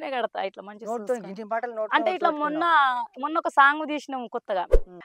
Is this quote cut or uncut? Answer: uncut